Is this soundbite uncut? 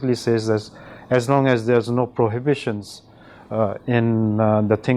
yes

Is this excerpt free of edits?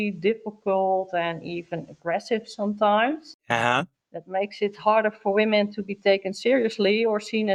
yes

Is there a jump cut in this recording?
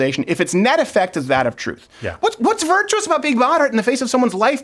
no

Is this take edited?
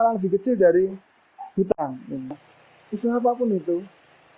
yes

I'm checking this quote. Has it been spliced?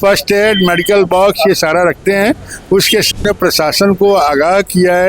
yes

